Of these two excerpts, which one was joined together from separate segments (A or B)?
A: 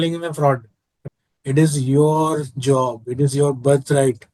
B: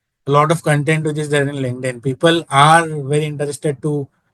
A